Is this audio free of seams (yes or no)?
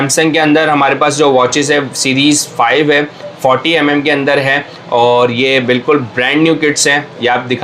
yes